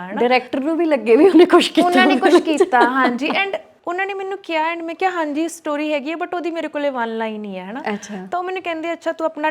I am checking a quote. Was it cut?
no; 0 cuts

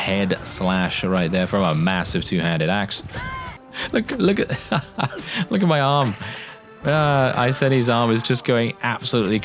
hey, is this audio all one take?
no; 1 cut; at 3.6 s

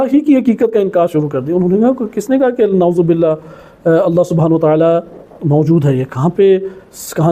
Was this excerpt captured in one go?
yes; 0 cuts

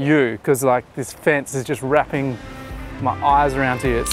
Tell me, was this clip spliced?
no; 0 cuts

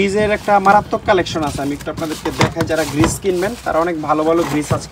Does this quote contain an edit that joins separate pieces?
no; 0 cuts

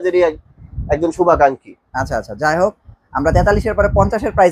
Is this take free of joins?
yes; 0 cuts

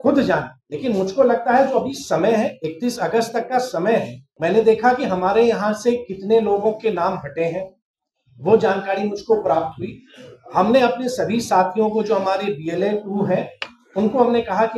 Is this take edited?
yes; 1 cut; at 4.2 s

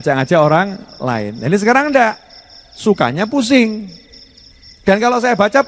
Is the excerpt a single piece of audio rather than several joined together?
yes; 0 cuts

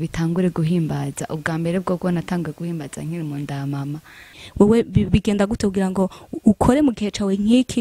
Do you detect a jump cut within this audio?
yes; 1 cut; at 4.3 s

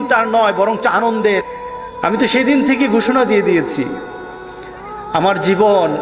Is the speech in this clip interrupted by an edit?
yes; 1 cut; at 1.4 s

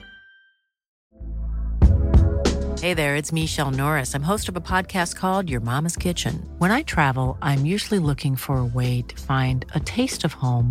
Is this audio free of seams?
no; 1 cut; at 1.0 s

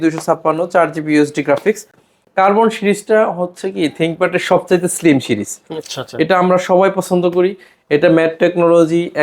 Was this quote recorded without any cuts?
yes; 0 cuts

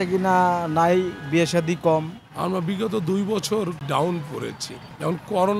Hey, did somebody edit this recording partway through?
yes; 1 cut; at 2.2 s

